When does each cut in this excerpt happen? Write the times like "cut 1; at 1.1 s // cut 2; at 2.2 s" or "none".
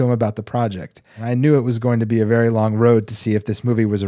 cut 1; at 1.2 s